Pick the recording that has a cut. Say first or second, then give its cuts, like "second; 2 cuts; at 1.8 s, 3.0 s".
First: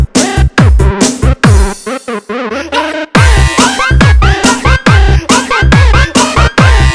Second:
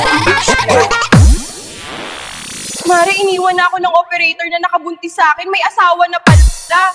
first; 1 cut; at 1.6 s